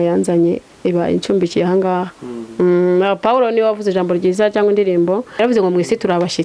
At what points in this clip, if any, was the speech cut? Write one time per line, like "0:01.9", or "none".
0:05.3